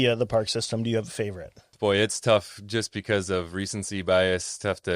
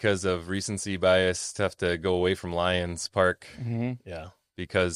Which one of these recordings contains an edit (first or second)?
first